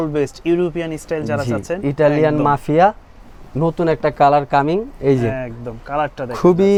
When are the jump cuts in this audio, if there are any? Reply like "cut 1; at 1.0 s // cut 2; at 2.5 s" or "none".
none